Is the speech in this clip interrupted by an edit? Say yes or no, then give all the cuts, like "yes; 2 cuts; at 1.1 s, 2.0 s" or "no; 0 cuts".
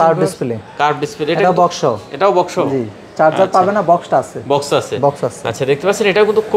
no; 0 cuts